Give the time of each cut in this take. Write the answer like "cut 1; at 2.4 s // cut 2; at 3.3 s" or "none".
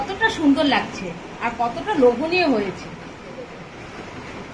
cut 1; at 3.6 s